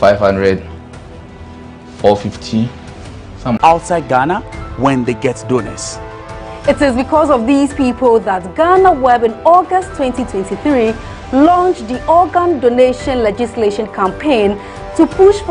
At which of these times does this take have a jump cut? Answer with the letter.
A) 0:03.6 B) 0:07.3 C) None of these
A